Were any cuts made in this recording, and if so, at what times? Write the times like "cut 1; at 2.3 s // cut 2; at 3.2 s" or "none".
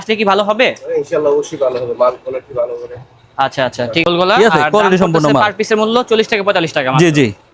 cut 1; at 4.0 s